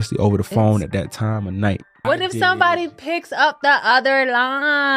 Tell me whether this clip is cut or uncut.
cut